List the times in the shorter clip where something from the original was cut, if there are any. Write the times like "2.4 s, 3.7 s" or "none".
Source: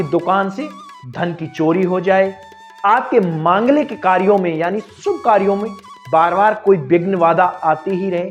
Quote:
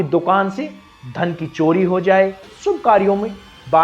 2.5 s